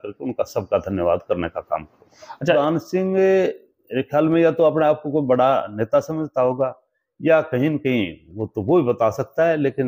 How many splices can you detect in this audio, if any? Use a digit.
1